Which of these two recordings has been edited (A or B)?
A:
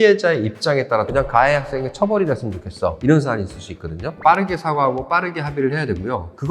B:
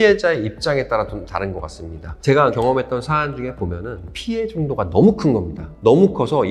A